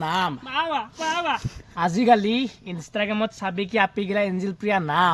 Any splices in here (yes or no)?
no